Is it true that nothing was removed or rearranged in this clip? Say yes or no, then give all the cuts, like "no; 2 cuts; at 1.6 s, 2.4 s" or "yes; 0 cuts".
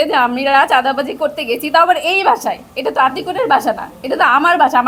yes; 0 cuts